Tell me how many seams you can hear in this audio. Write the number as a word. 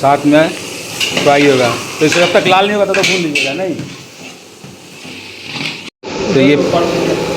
one